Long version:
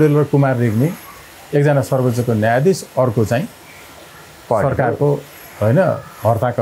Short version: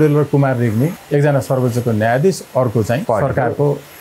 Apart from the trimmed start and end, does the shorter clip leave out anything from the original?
yes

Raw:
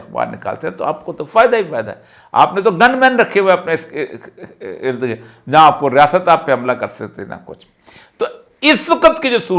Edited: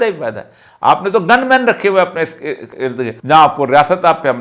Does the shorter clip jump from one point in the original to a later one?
yes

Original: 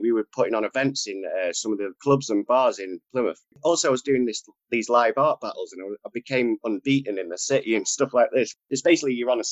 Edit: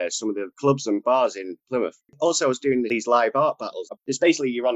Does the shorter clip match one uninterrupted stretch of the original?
no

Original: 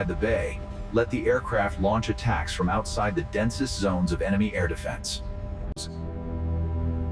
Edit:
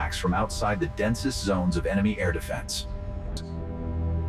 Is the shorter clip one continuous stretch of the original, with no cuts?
no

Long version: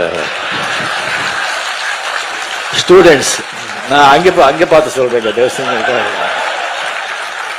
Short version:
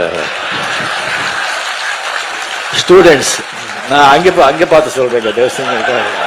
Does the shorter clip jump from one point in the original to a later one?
no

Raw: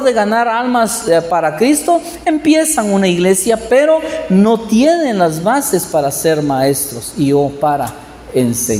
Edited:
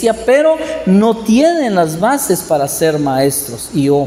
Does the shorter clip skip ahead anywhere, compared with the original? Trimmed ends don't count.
no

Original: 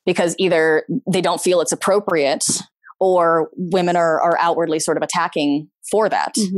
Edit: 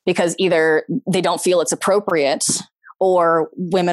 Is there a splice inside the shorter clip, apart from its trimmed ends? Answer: no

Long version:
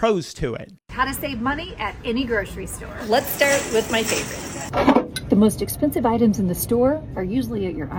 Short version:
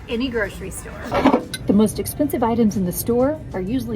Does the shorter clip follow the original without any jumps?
no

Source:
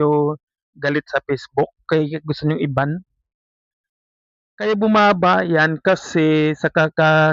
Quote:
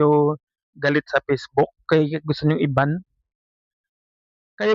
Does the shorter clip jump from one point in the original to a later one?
no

